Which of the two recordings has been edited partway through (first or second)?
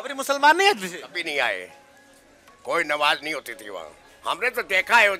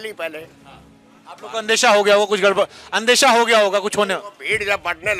first